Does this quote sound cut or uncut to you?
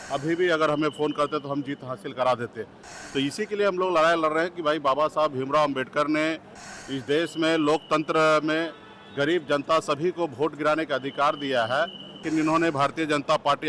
cut